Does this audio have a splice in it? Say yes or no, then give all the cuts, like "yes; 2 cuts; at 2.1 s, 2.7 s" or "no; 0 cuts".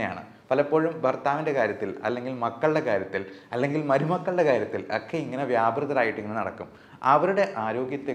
no; 0 cuts